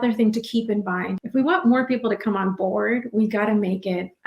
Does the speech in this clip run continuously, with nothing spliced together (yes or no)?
no